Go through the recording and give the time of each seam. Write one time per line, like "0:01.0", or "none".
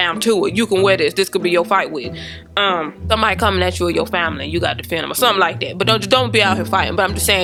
none